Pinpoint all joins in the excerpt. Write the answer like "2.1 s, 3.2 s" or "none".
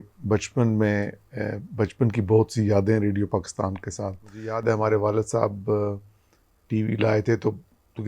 4.6 s